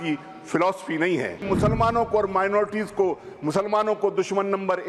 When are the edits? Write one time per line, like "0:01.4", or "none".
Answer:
0:01.4